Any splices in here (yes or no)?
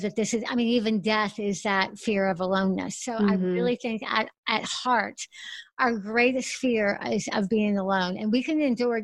no